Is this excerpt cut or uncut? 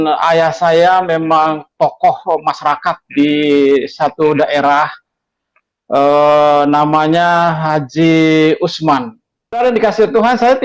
cut